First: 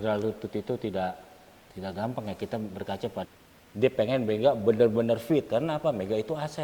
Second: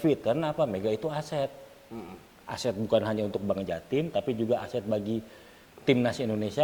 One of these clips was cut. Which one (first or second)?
first